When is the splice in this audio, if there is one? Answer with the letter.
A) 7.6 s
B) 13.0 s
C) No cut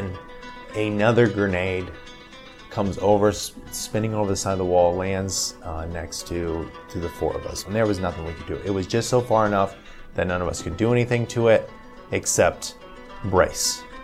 A